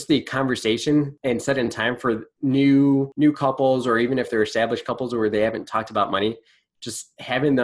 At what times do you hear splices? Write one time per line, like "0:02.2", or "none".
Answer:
0:01.1
0:02.3
0:03.1

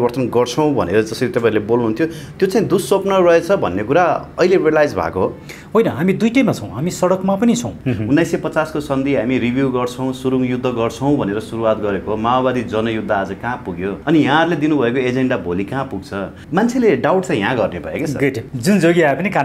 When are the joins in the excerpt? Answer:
0:07.7
0:14.0
0:16.4
0:18.5

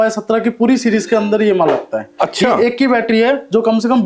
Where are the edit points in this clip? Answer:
none

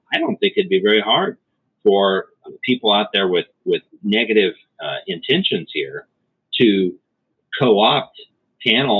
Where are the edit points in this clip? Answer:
0:02.3
0:03.9

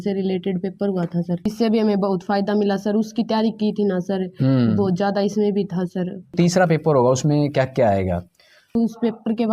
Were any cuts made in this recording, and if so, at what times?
0:01.5
0:06.3

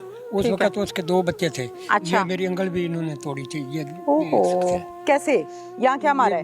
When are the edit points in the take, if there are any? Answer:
0:01.7

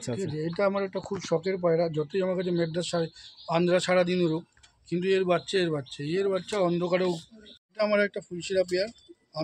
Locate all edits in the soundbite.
0:07.7

